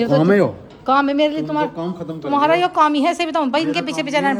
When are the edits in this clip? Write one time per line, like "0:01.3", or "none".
none